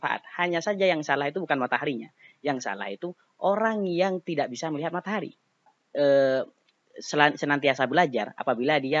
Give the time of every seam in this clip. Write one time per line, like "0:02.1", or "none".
0:05.8